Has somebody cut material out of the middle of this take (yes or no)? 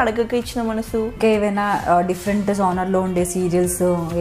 yes